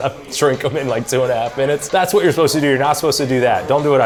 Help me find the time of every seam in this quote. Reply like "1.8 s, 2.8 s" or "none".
none